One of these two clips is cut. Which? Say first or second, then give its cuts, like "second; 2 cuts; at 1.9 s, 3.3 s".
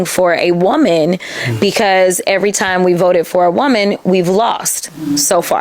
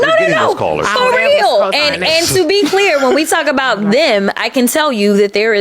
second; 1 cut; at 2.6 s